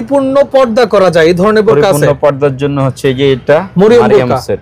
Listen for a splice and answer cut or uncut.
uncut